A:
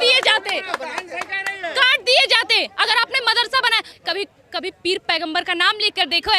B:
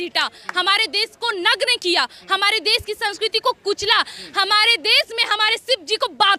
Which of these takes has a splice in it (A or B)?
A